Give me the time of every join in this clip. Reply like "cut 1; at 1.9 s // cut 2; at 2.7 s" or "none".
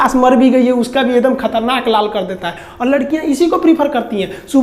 none